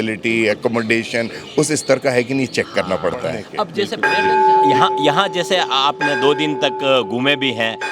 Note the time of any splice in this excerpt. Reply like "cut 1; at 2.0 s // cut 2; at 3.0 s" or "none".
cut 1; at 3.8 s